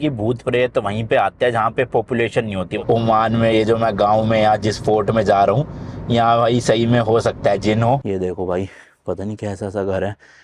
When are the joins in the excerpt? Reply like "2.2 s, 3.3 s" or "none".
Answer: 2.8 s, 8.0 s